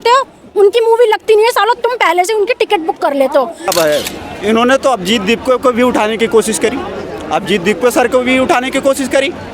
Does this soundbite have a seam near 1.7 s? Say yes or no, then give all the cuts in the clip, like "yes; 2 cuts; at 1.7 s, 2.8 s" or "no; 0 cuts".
no; 1 cut; at 3.7 s